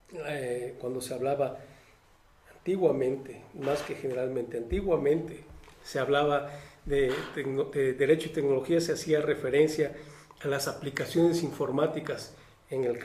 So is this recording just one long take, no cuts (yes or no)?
yes